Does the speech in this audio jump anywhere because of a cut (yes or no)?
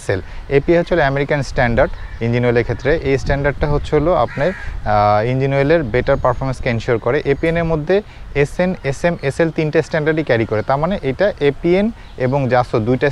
no